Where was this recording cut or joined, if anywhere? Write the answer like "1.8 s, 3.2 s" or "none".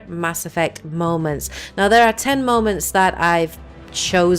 1.9 s